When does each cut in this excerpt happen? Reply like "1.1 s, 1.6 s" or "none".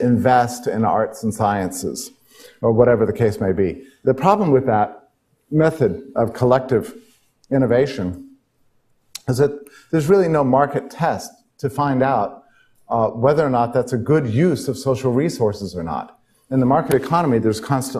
16.9 s